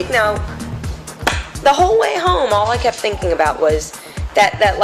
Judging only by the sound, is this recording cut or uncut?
uncut